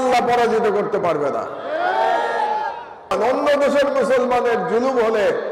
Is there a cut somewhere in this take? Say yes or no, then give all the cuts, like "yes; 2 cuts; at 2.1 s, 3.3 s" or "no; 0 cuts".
yes; 1 cut; at 3.1 s